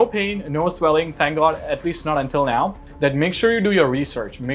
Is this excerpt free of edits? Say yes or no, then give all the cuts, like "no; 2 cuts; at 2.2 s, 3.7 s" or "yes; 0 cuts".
no; 1 cut; at 2.8 s